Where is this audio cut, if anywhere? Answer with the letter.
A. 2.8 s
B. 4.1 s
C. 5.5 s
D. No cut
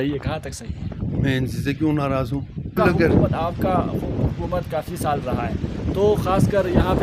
A